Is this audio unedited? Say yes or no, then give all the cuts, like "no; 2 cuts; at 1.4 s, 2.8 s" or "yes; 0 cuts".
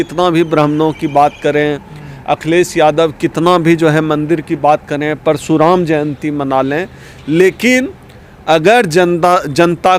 yes; 0 cuts